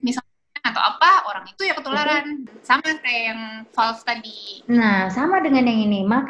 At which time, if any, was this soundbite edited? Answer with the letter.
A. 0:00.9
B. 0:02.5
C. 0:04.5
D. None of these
B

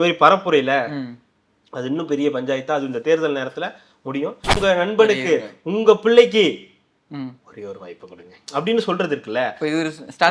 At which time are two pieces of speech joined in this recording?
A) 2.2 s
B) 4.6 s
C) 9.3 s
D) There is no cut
B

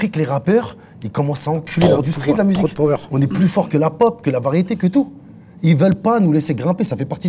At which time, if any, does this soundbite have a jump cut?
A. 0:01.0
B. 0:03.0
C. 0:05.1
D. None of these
D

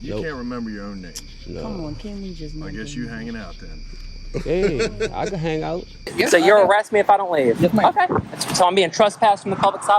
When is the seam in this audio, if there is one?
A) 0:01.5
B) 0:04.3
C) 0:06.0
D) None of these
C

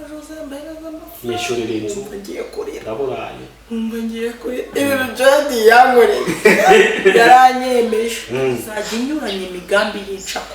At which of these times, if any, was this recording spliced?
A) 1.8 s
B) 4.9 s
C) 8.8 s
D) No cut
C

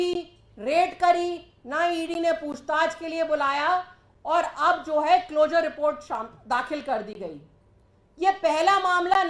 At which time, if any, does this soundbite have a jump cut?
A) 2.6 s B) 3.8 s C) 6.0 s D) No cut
D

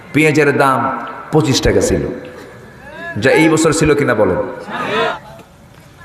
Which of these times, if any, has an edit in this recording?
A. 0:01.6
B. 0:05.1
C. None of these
B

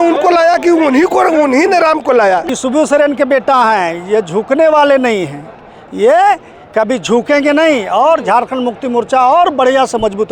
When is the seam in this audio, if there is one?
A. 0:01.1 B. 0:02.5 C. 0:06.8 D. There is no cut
B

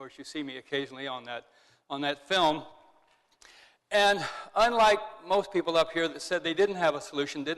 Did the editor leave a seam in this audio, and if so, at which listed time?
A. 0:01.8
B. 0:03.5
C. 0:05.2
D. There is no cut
B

